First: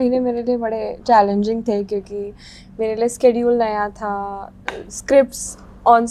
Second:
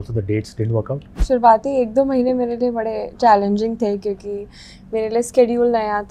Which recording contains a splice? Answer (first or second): second